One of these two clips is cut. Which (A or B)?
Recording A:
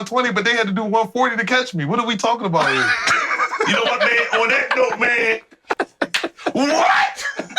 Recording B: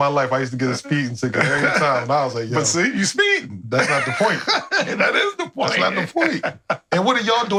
A